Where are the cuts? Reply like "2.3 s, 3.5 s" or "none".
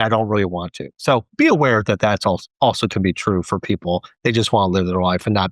none